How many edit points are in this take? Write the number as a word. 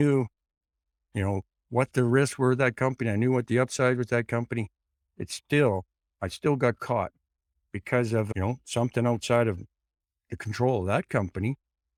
zero